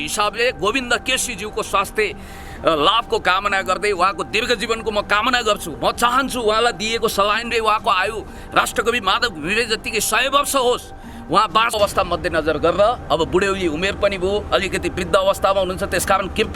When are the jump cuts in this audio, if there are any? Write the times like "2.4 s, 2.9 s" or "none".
11.8 s

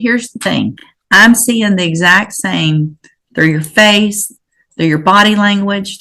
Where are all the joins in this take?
0.9 s

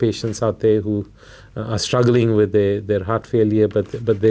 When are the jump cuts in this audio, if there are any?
none

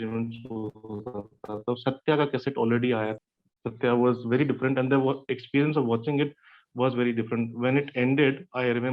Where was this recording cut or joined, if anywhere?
3.1 s

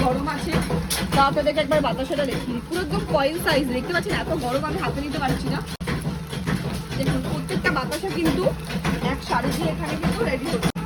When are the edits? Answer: none

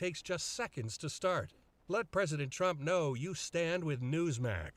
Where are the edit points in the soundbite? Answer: none

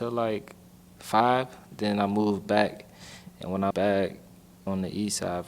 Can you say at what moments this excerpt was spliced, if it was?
3.7 s, 4.6 s

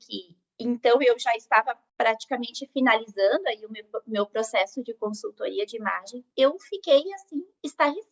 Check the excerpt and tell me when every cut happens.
2.2 s

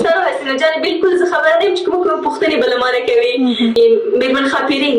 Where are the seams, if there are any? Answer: 3.8 s

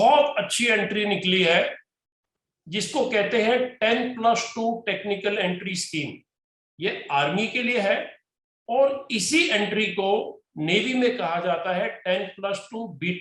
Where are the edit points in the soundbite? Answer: none

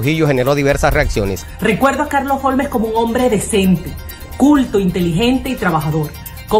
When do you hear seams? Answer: 1.4 s

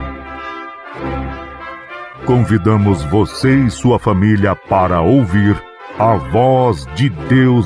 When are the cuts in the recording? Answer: 2.1 s

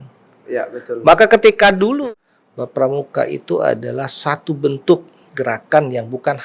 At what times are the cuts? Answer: 2.0 s

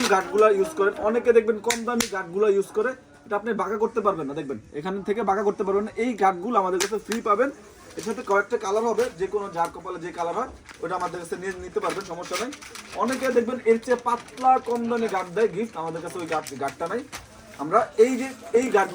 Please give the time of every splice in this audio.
none

